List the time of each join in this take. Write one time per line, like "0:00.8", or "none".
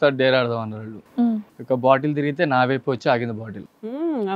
0:01.3